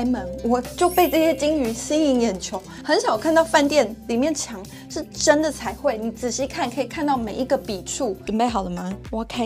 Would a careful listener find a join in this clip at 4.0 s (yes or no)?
no